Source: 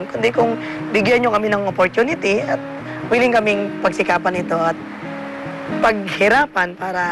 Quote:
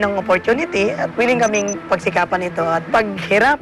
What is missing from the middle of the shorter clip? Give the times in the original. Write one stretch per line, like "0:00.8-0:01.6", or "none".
0:02.6-0:03.0
0:04.8-0:05.8